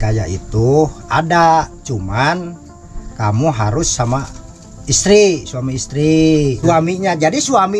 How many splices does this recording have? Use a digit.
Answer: 1